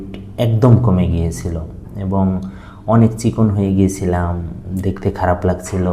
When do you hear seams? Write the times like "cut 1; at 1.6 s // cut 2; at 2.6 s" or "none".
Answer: cut 1; at 4.5 s